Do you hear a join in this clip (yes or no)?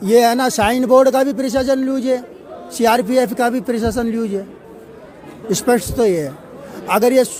no